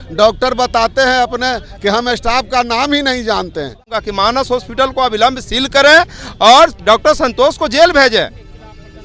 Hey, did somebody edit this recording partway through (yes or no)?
yes